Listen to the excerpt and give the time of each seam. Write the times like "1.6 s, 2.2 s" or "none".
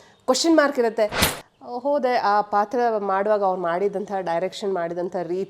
1.2 s

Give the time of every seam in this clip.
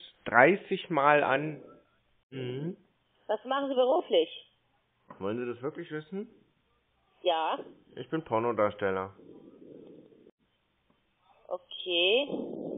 2.3 s

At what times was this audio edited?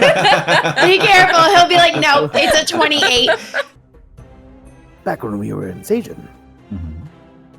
3.7 s

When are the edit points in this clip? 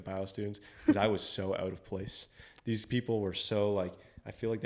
none

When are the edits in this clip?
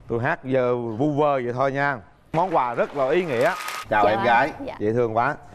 3.7 s

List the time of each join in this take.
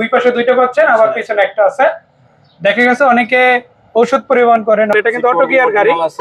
4.9 s

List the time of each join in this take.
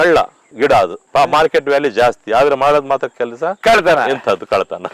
1.0 s

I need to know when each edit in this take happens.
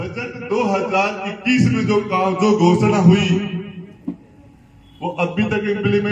none

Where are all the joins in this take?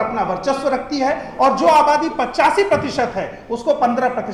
none

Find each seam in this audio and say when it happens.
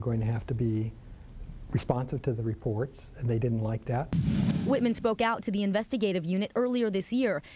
none

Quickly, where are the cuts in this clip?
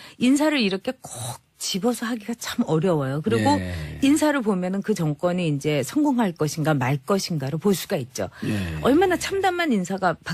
1.2 s

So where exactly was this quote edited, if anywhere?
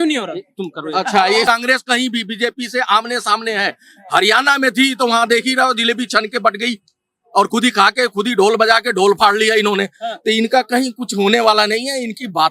1.4 s

